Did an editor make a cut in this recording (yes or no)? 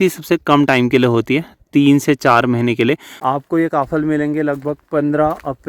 yes